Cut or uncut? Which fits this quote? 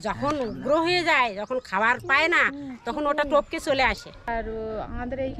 cut